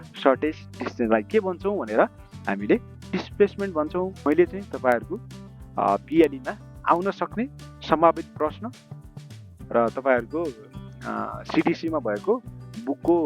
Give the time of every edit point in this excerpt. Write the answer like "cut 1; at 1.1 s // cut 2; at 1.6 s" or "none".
cut 1; at 4.2 s